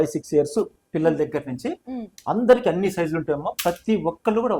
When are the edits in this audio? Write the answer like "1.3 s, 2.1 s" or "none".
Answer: none

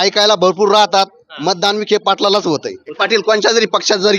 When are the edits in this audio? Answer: 3.0 s

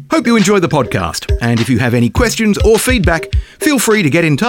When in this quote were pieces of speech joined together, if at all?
none

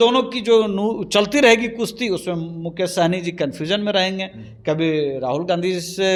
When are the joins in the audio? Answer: none

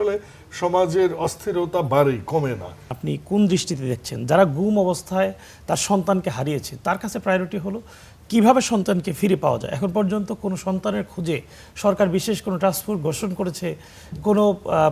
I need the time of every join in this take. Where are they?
3.0 s

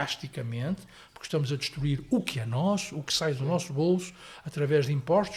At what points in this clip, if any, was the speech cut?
none

